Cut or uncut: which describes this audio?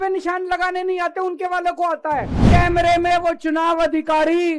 cut